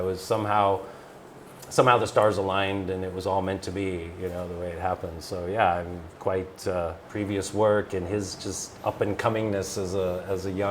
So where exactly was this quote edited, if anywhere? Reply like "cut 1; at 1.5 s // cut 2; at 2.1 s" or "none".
cut 1; at 7.0 s